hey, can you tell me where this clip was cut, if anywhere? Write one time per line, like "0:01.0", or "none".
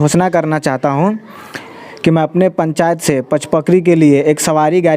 none